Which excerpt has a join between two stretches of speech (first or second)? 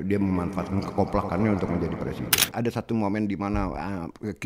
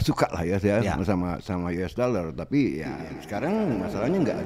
first